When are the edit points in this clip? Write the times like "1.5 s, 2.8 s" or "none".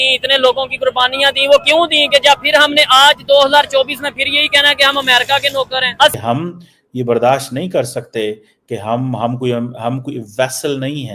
6.2 s